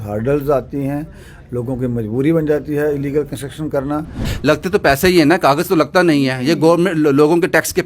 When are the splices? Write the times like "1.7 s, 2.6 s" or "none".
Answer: 4.3 s